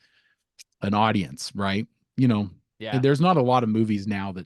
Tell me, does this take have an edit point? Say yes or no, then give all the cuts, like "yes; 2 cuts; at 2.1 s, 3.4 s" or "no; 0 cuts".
no; 0 cuts